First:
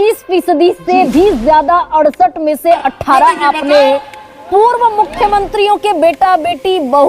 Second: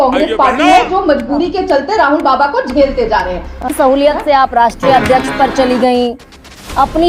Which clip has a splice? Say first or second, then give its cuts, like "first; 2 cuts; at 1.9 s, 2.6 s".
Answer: second; 1 cut; at 3.8 s